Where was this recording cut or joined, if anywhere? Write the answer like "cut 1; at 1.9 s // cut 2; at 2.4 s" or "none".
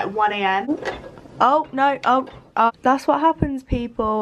cut 1; at 0.7 s // cut 2; at 2.7 s

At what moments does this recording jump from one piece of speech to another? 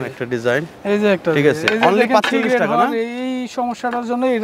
none

